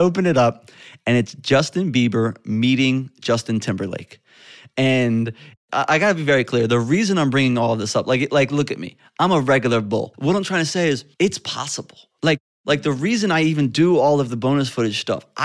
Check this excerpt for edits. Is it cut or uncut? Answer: cut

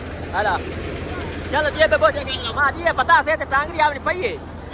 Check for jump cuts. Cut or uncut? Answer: uncut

